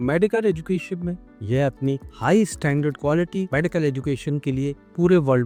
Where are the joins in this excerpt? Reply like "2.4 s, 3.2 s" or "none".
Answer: none